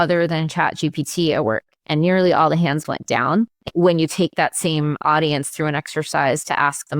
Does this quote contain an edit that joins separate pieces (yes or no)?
yes